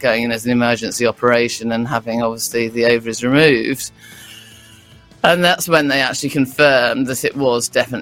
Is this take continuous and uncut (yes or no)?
yes